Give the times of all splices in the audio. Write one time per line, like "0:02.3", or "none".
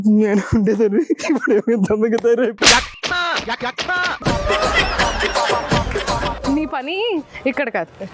none